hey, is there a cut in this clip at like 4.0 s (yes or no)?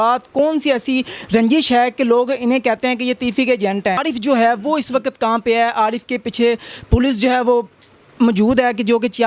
yes